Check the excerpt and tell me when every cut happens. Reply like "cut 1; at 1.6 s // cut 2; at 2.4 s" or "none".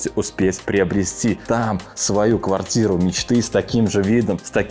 none

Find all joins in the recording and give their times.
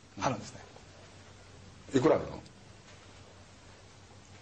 cut 1; at 1.6 s

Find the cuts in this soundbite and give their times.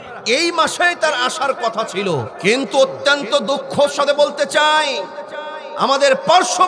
cut 1; at 2.3 s

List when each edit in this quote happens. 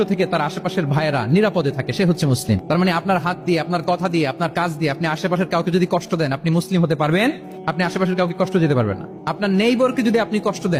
none

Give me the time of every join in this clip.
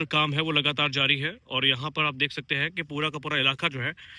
none

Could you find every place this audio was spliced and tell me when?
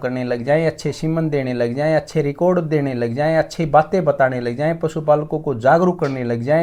none

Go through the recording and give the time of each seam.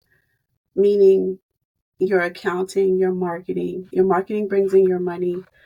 none

